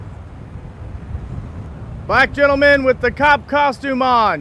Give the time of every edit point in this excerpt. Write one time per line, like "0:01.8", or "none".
0:01.7